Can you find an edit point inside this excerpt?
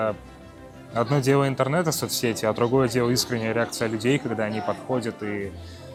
no; 0 cuts

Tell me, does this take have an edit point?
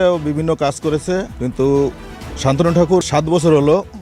yes; 2 cuts; at 1.3 s, 3.0 s

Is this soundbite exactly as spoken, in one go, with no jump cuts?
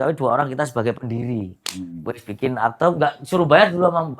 yes; 0 cuts

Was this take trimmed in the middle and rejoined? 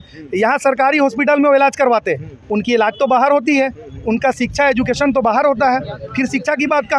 no; 0 cuts

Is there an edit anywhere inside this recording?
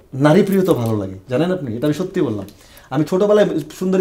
yes; 1 cut; at 3.1 s

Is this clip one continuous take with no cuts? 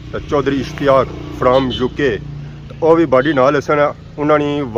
yes; 0 cuts

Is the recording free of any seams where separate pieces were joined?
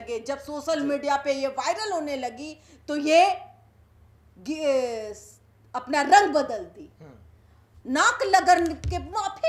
yes; 0 cuts

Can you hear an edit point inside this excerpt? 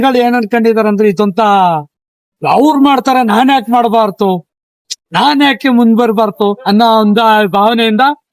no; 0 cuts

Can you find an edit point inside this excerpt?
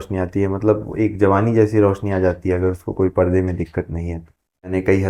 no; 0 cuts

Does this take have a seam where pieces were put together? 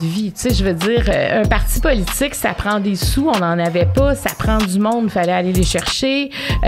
yes; 1 cut; at 1.1 s

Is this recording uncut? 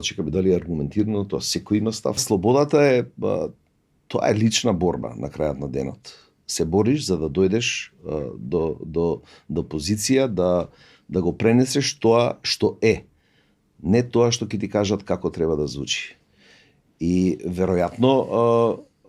no; 1 cut; at 2.2 s

